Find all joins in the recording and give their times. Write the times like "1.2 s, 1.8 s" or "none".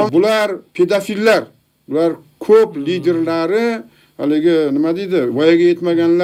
none

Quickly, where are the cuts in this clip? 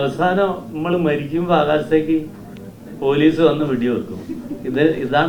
none

